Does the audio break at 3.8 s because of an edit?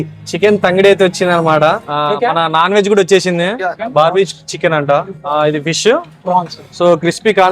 yes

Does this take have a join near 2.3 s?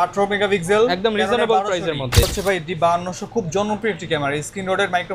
yes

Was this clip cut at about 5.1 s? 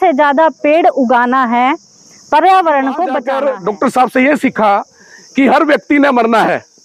no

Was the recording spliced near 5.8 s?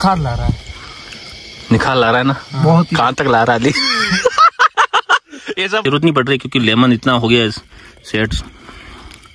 yes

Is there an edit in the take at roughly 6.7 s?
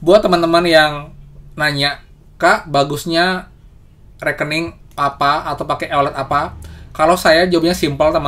no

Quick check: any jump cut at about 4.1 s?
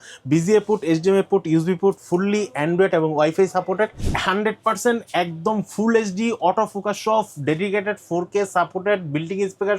yes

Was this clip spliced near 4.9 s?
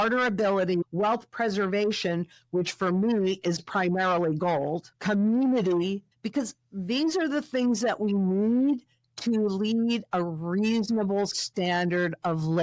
yes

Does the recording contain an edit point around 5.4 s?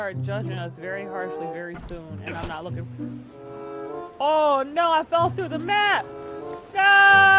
no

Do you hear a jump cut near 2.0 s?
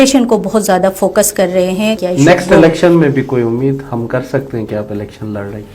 yes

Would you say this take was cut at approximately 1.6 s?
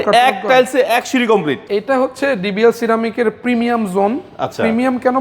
yes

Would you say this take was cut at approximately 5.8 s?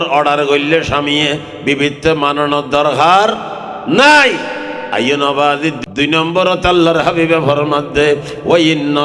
yes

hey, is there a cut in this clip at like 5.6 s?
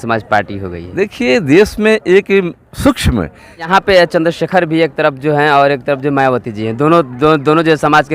no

